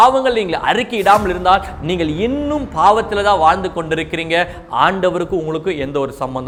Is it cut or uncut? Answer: uncut